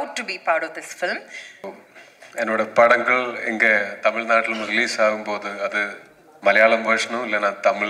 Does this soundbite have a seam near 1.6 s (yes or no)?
yes